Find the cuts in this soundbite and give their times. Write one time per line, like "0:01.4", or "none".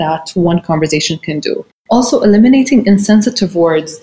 0:01.7